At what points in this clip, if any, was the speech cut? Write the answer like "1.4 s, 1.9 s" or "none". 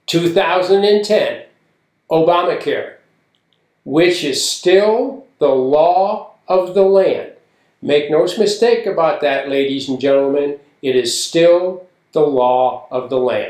none